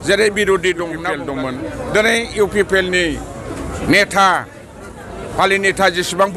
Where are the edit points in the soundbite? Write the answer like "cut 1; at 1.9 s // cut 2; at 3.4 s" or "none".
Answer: cut 1; at 1.1 s